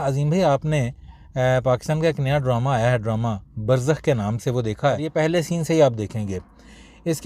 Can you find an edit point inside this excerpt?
yes; 1 cut; at 5.0 s

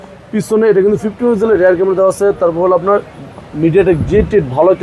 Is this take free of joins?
yes; 0 cuts

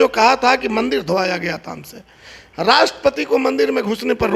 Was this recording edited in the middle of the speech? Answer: no; 0 cuts

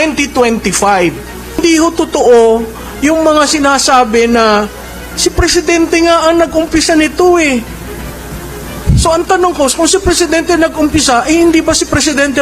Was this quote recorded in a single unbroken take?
no; 1 cut; at 1.6 s

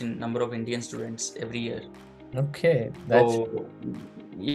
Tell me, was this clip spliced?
no; 0 cuts

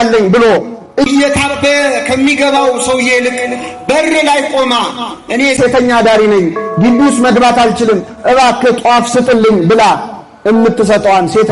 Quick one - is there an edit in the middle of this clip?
no; 0 cuts

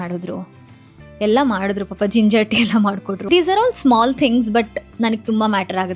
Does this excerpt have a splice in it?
yes; 1 cut; at 3.2 s

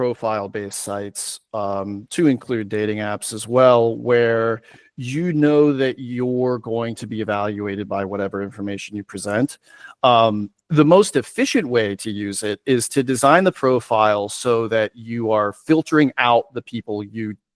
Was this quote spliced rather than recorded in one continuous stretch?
no; 0 cuts

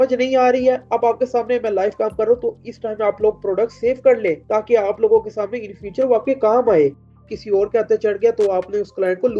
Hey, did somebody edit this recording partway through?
yes; 1 cut; at 7.3 s

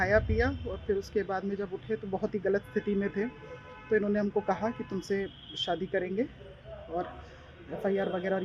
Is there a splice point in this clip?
no; 0 cuts

